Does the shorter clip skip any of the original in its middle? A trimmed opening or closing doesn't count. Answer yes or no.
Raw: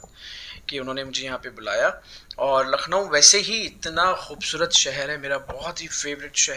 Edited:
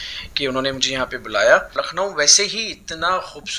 yes